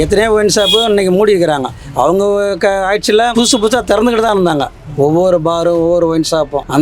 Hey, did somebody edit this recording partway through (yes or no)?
no